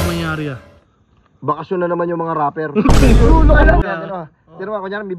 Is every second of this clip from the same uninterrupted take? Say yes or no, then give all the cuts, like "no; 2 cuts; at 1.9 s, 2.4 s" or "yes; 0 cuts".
no; 1 cut; at 3.8 s